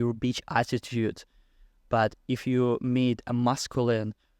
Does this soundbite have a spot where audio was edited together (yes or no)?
no